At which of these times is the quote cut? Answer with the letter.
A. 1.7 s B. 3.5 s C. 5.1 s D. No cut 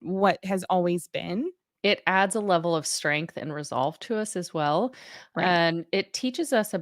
A